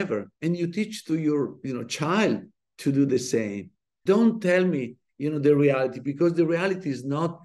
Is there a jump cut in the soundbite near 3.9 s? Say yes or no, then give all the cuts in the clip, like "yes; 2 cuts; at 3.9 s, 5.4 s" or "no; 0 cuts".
yes; 1 cut; at 3.9 s